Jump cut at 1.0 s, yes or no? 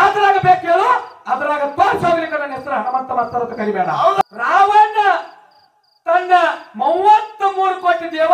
no